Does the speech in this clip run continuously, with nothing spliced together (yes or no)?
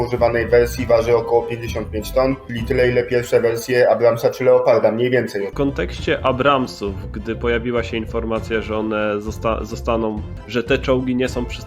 no